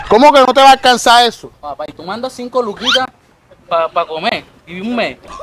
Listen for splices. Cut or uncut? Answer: uncut